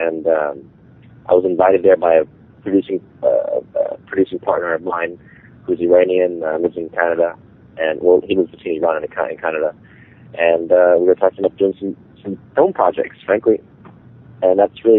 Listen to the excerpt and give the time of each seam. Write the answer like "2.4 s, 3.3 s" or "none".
3.7 s